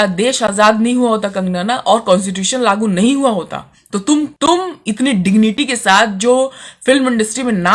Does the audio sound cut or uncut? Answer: cut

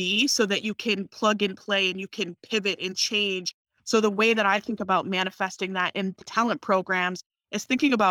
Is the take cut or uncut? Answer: cut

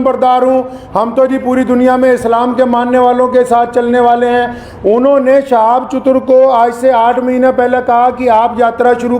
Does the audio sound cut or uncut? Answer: uncut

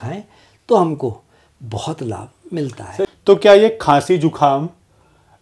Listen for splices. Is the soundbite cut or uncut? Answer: cut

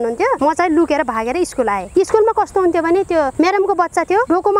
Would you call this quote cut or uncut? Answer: cut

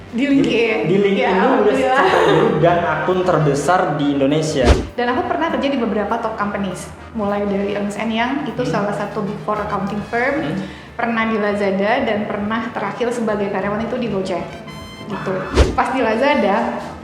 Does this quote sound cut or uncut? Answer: cut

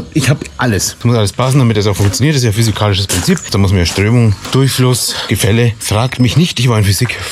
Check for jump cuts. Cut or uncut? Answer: cut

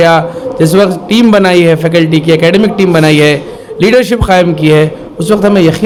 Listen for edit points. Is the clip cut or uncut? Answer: uncut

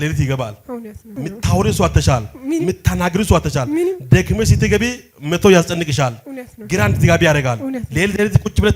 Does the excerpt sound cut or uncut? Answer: cut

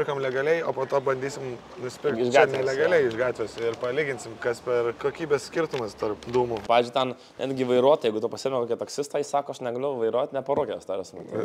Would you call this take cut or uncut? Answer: cut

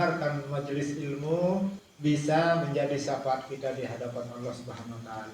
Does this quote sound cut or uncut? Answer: cut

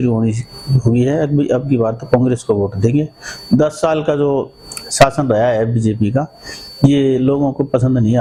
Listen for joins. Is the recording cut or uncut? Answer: uncut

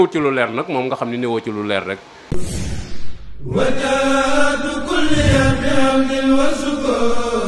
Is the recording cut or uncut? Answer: cut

